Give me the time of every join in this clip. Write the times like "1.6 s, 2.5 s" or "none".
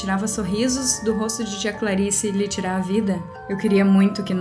none